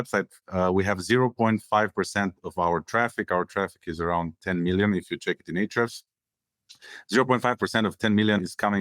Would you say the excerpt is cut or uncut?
uncut